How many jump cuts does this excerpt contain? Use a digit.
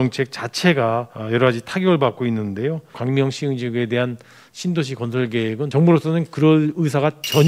3